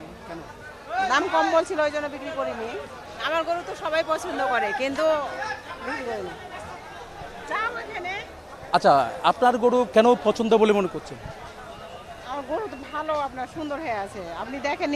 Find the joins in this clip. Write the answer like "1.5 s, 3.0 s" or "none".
none